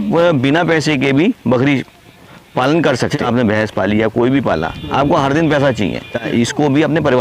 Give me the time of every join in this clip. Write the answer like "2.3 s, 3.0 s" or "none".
3.2 s, 6.2 s